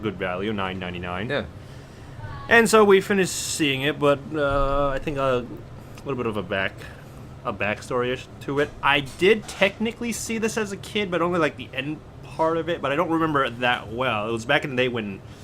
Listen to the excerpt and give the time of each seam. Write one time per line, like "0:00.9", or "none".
0:04.8